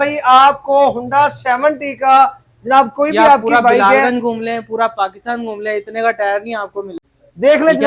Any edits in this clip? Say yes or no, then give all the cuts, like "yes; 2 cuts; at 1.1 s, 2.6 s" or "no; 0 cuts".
yes; 1 cut; at 6.8 s